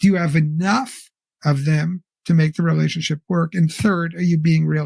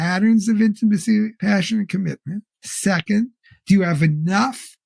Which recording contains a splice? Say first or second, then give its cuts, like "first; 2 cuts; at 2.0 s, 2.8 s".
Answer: second; 1 cut; at 1.4 s